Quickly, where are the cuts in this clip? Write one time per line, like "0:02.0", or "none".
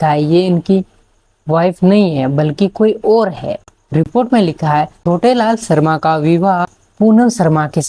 0:04.1
0:04.9